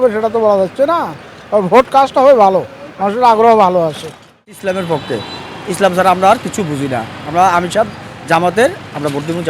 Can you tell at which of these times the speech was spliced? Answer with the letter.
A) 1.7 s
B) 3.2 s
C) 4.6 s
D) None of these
C